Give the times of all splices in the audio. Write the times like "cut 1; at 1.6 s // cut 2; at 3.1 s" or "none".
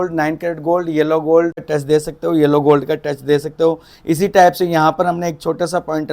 cut 1; at 1.7 s